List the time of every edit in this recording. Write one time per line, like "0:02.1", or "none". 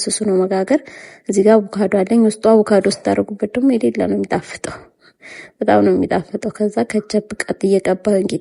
none